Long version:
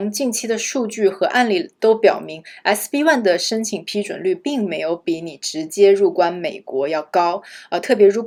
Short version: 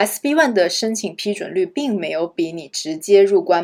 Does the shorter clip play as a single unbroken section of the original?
yes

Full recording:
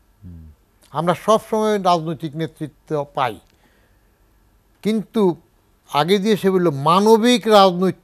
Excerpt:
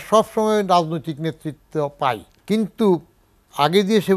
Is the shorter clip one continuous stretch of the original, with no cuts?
no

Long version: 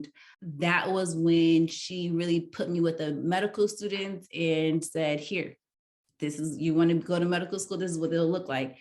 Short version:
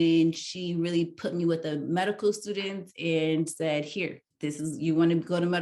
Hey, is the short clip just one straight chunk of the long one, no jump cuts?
no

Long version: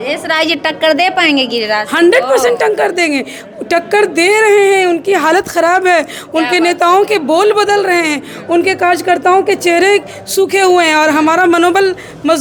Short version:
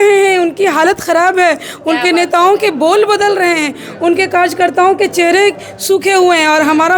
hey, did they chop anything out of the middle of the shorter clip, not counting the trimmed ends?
no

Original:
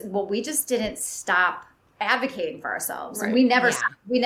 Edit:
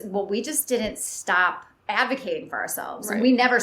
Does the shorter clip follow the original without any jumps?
no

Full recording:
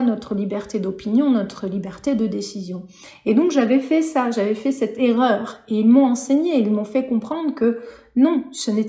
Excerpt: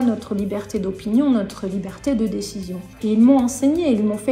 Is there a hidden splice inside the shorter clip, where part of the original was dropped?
yes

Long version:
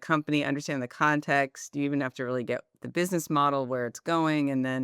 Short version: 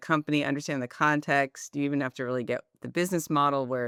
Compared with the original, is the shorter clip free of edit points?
yes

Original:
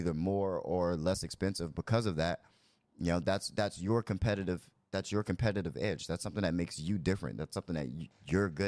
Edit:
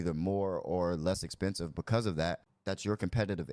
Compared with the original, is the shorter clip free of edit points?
no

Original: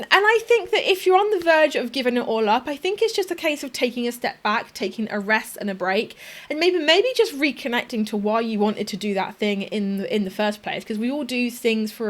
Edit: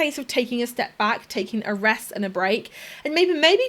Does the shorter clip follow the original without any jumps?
yes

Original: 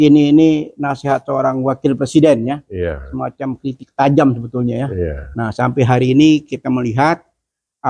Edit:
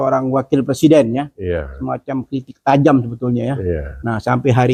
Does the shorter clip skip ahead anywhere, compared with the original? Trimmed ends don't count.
no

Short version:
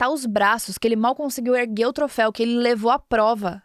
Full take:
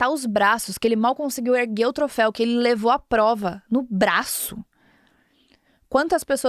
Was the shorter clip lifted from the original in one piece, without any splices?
yes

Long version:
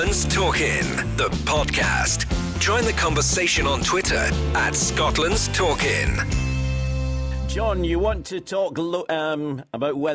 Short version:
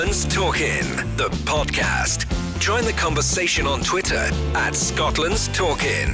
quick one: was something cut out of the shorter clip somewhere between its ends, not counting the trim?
no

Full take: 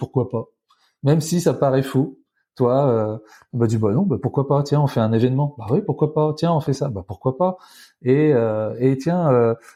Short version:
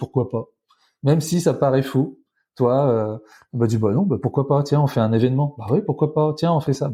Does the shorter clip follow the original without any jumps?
yes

